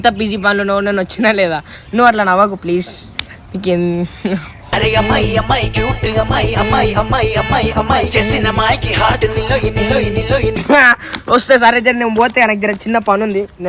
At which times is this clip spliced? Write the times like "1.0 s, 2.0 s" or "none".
none